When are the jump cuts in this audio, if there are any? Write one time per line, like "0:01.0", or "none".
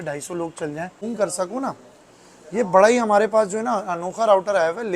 0:00.9